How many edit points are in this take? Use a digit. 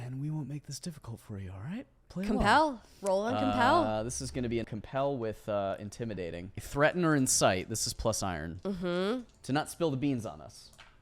3